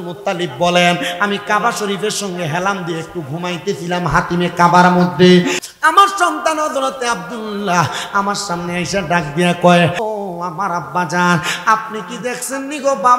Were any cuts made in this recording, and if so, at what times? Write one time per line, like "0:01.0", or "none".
0:05.7
0:10.0